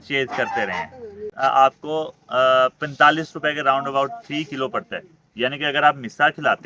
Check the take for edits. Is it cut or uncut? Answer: cut